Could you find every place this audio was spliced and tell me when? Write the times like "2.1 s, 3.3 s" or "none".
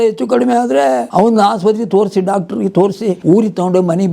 1.1 s, 3.2 s

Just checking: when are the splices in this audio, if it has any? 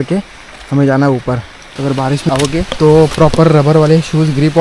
1.6 s, 2.7 s

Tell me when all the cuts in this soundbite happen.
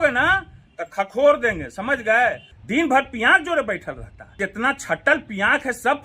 2.5 s, 4.4 s

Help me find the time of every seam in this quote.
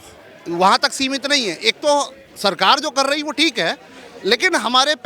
none

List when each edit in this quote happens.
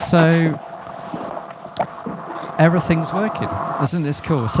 1.1 s

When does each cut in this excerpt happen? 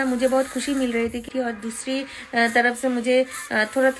1.3 s

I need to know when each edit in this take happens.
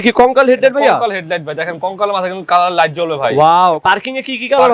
3.8 s

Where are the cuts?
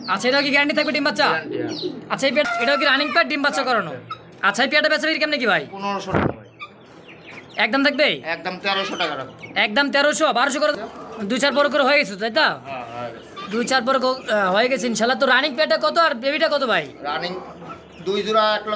2.4 s, 10.7 s

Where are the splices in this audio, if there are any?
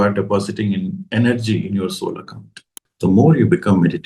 2.8 s

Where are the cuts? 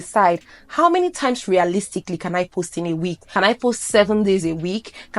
3.2 s

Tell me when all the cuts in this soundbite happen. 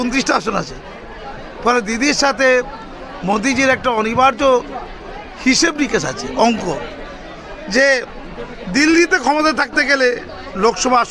none

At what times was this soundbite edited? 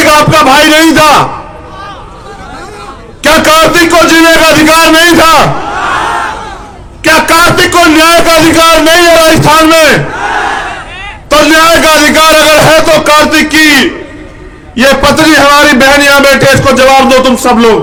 none

